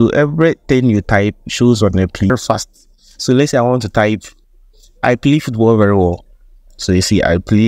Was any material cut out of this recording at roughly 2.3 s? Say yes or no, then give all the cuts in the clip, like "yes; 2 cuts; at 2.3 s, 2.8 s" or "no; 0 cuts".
yes; 1 cut; at 2.3 s